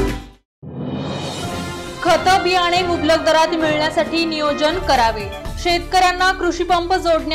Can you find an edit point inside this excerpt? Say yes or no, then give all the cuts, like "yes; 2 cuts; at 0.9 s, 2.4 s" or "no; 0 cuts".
no; 0 cuts